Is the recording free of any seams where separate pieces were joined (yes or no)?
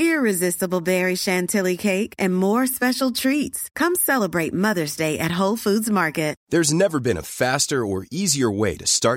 no